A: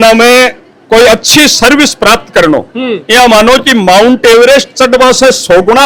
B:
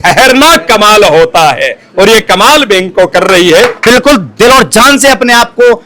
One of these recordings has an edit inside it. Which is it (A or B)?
B